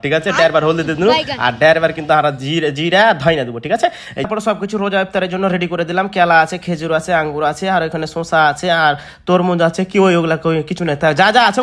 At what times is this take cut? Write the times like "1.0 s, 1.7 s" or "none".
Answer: 4.3 s

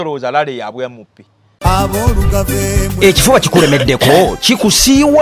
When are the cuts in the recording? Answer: 1.5 s

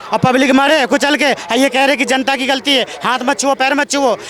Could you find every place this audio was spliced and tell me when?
none

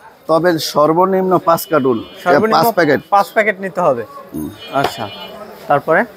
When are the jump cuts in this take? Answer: none

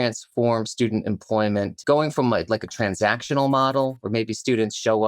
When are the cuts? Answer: 1.8 s

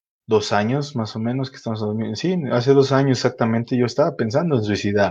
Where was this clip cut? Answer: none

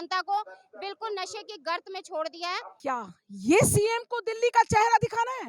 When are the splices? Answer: 2.7 s

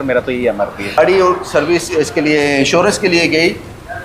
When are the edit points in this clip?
1.0 s

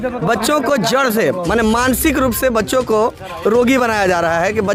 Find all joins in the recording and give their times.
none

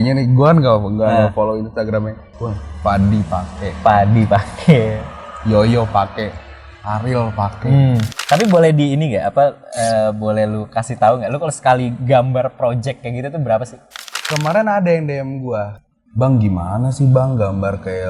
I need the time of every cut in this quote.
8.1 s, 14.2 s

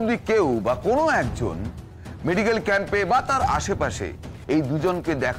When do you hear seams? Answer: none

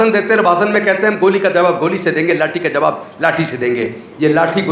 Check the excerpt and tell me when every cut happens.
none

